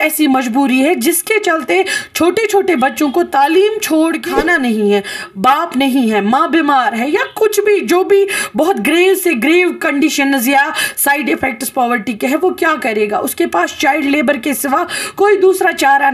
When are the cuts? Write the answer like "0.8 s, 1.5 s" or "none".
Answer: 4.2 s